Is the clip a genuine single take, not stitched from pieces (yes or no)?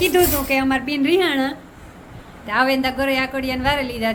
yes